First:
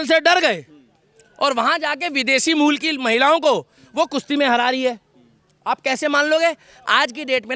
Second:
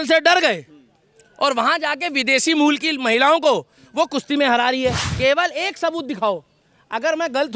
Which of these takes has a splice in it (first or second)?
second